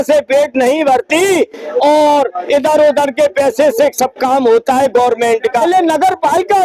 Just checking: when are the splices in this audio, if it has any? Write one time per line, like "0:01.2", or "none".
0:05.6